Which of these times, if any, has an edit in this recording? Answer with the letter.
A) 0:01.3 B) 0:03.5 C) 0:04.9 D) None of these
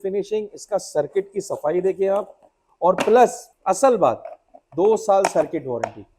B